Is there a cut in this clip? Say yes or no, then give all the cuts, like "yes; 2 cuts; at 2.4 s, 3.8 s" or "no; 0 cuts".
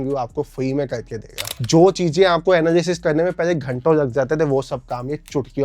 yes; 1 cut; at 1.5 s